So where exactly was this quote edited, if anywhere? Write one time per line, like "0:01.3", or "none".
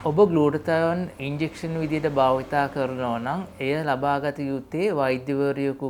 0:03.5
0:04.6